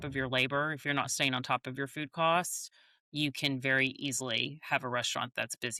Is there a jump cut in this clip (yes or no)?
no